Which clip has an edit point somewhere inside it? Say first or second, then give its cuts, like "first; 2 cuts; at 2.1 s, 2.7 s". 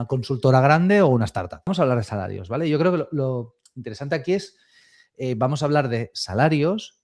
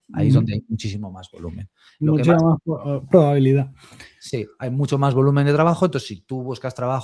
first; 1 cut; at 1.7 s